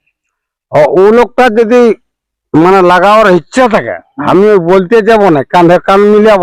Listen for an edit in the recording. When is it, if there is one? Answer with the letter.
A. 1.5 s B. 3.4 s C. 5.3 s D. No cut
D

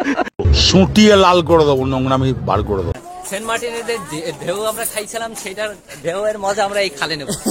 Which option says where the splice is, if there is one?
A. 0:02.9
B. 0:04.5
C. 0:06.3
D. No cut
A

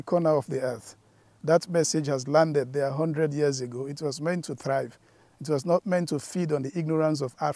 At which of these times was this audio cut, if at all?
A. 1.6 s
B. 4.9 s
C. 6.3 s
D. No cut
D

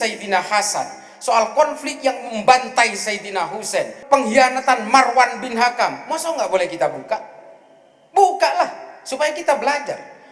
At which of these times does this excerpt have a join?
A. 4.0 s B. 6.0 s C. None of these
A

